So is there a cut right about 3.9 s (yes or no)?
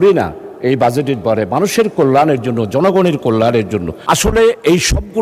yes